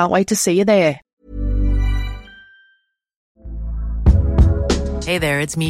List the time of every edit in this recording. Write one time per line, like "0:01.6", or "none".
0:01.2
0:03.3